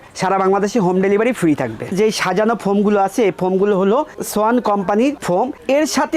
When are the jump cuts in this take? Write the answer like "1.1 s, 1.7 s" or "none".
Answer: 1.9 s

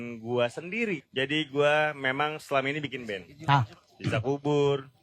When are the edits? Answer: 1.0 s

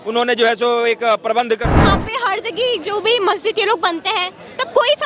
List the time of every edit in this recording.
1.8 s

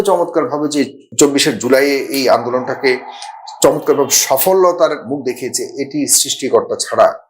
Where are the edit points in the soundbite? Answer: 1.0 s

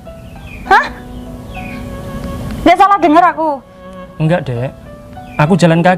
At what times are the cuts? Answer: none

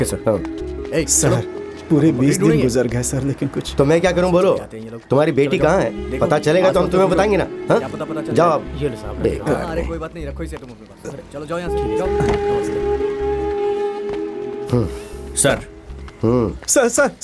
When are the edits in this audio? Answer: none

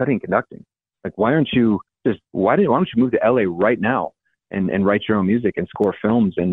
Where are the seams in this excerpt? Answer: 1.9 s

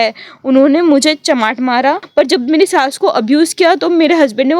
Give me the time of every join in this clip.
2.0 s

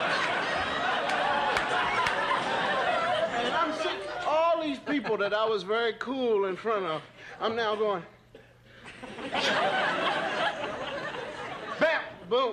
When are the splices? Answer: none

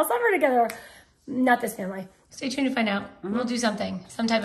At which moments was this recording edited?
2.1 s

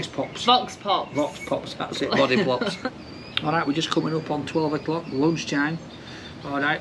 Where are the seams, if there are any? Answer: 2.8 s

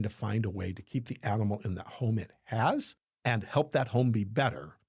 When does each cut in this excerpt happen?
3.0 s

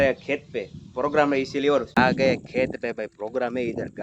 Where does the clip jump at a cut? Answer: 1.9 s

